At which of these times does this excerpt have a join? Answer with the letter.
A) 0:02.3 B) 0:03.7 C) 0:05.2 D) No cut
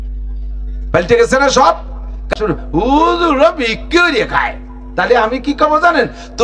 A